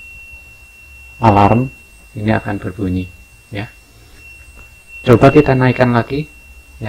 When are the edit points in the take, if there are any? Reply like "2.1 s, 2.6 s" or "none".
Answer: none